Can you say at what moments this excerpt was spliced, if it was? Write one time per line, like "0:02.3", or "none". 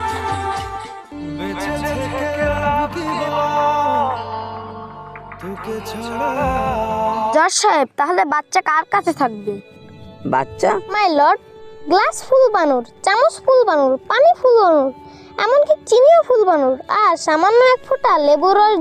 0:07.3
0:10.9